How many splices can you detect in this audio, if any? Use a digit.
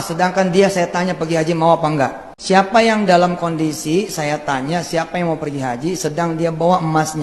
1